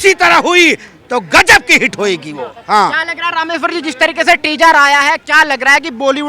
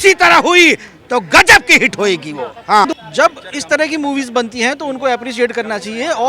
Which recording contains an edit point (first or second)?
second